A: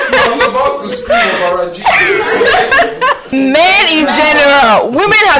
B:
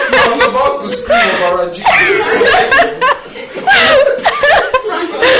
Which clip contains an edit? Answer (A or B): A